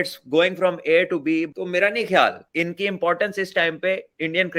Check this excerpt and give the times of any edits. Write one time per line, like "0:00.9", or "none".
0:01.5
0:02.4